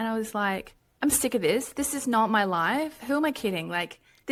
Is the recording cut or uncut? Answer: uncut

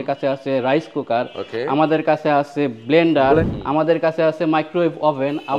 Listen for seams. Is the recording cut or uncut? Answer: cut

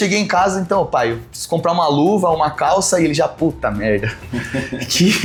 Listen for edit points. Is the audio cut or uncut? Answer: uncut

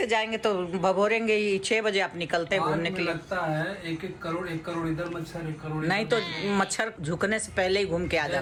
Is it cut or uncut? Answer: uncut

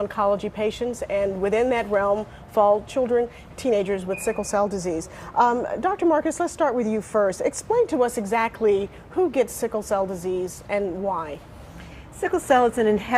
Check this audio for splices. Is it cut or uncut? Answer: uncut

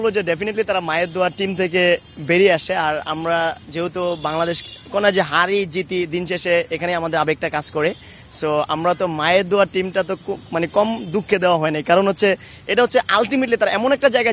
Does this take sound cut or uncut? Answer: uncut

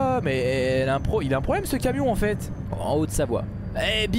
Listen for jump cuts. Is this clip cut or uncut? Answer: cut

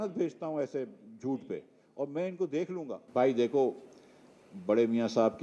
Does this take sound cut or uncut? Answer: cut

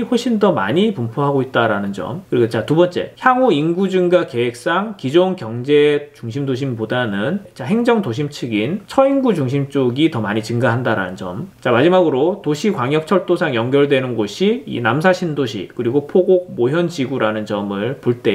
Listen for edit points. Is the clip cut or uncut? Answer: uncut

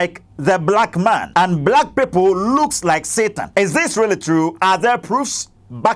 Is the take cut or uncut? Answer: cut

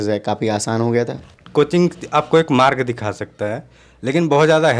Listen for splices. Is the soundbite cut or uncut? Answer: cut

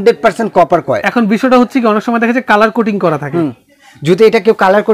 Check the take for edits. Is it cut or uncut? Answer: uncut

